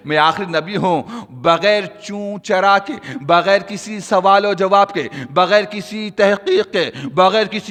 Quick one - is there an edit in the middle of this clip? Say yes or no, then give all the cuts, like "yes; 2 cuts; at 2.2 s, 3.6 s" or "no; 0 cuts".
no; 0 cuts